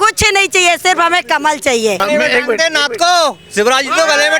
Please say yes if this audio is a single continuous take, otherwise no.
no